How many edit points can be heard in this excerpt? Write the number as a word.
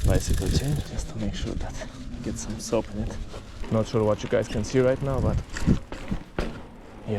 two